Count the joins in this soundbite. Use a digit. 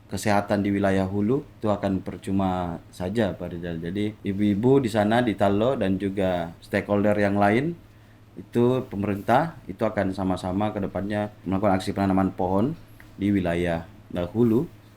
4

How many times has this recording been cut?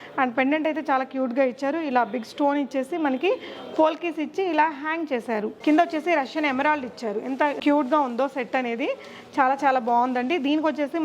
1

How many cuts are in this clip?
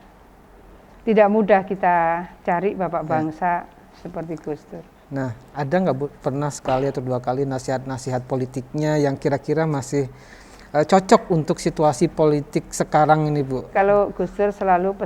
1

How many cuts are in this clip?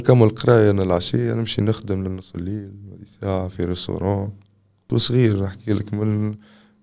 1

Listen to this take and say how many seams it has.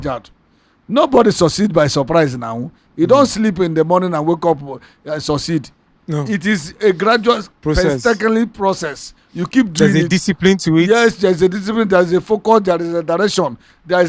0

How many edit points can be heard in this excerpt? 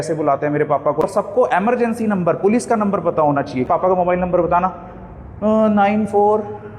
2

